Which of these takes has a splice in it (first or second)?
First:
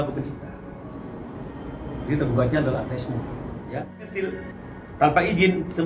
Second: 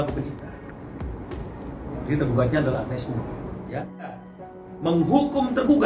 first